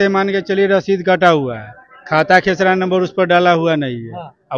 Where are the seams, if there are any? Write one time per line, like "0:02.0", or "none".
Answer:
none

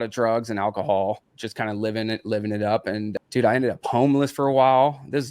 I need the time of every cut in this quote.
0:01.4
0:03.1

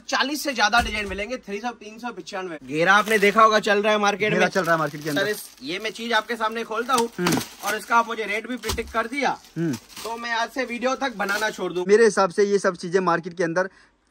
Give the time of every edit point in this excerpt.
0:02.6
0:11.9

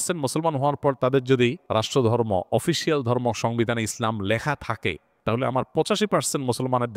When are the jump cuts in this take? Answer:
0:01.6
0:05.1

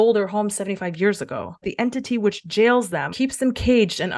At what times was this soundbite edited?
0:01.6
0:03.1

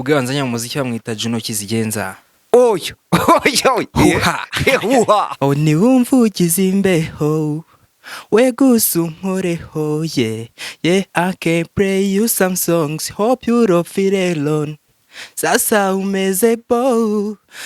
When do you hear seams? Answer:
0:05.3

